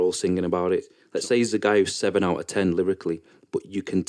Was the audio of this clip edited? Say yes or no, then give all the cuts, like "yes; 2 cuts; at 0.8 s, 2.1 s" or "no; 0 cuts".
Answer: yes; 1 cut; at 1.0 s